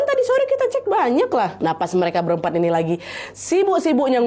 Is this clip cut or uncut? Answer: cut